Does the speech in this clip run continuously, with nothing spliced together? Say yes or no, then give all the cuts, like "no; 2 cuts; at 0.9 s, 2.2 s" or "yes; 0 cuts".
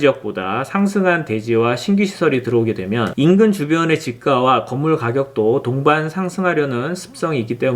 yes; 0 cuts